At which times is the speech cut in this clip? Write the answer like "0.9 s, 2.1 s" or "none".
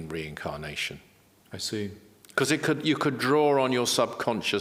none